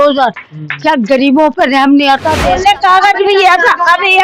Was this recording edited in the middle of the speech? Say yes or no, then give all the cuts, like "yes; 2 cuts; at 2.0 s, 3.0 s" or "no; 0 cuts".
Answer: yes; 1 cut; at 2.5 s